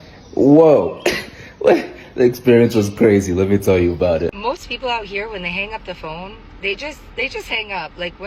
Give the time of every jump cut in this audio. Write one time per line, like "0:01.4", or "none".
0:04.4